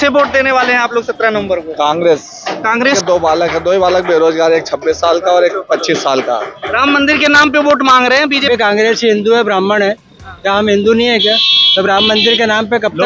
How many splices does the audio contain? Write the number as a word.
two